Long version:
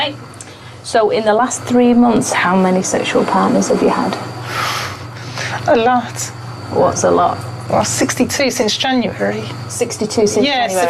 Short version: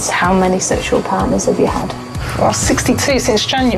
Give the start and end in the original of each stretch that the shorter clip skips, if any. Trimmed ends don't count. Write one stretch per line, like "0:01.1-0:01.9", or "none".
0:04.4-0:07.5